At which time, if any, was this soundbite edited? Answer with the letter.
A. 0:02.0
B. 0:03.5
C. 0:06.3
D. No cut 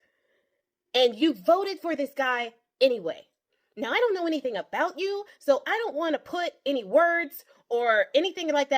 D